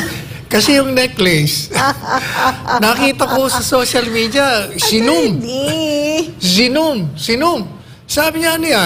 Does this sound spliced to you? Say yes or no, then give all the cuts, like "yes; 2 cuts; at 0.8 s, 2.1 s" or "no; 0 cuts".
no; 0 cuts